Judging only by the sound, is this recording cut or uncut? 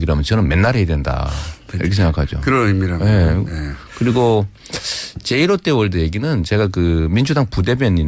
uncut